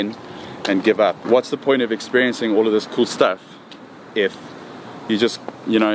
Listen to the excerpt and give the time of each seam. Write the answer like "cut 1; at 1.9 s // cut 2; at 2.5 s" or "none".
cut 1; at 1.2 s